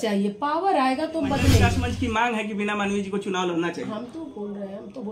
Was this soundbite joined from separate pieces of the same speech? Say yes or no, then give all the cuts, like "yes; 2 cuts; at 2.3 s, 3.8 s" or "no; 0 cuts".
yes; 1 cut; at 1.7 s